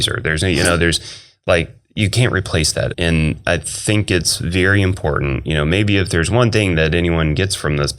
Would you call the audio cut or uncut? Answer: cut